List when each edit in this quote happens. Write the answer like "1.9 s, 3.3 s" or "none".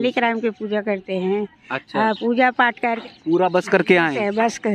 2.8 s